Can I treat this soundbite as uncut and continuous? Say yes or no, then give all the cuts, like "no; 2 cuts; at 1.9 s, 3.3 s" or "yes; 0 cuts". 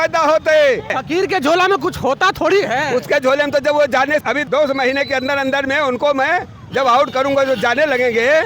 no; 2 cuts; at 1.0 s, 4.3 s